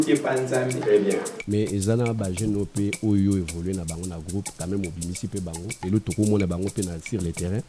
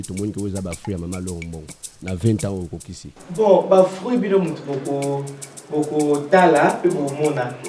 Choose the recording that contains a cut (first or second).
first